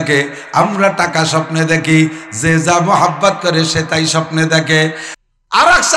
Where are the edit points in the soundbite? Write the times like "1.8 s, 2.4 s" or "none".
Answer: 5.1 s